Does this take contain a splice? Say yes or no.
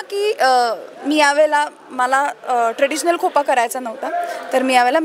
no